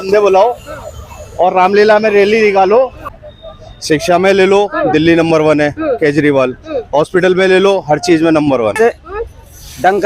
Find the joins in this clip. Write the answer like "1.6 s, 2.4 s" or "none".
3.1 s, 8.8 s